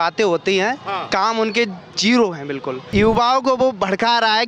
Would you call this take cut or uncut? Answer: cut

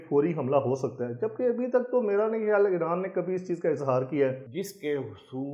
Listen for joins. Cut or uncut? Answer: cut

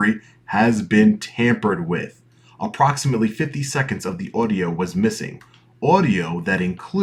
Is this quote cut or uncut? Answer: uncut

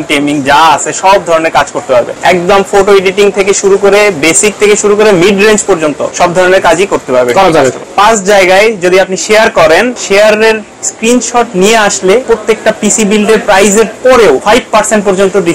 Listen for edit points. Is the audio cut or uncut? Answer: cut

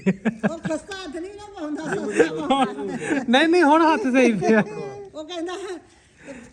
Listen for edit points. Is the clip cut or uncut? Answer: uncut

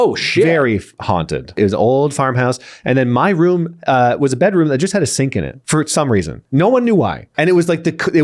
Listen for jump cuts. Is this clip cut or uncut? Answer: cut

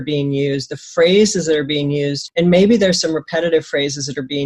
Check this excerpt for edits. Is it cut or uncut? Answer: cut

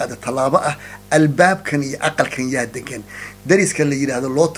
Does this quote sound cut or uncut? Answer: uncut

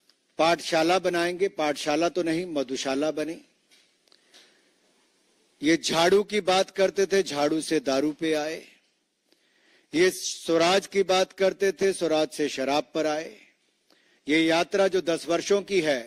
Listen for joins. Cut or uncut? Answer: uncut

